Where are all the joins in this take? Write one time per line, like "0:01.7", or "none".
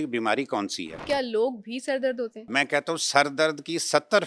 0:01.0
0:02.5